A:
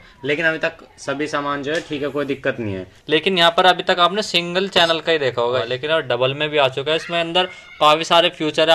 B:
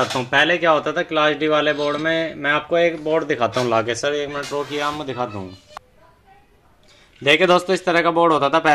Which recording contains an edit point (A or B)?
A